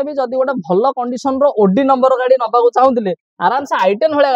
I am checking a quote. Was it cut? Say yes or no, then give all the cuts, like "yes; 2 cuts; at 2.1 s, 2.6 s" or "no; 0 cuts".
no; 0 cuts